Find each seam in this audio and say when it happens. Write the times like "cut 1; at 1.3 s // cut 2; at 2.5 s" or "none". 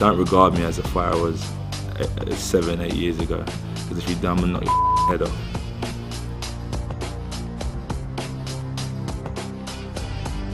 none